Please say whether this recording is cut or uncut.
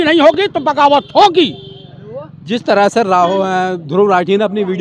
uncut